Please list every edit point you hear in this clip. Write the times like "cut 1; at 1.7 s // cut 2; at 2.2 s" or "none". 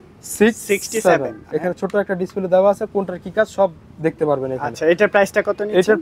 cut 1; at 1.4 s